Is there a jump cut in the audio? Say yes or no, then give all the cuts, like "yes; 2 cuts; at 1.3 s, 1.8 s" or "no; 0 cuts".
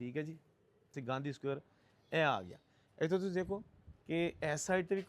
yes; 1 cut; at 0.9 s